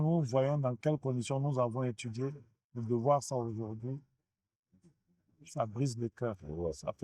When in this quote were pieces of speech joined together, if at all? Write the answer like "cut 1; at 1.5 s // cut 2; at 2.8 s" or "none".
none

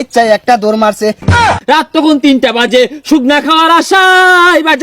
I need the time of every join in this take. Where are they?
cut 1; at 1.4 s

